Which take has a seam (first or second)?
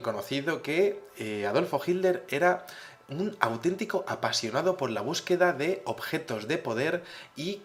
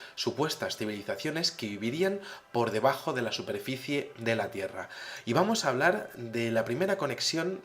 second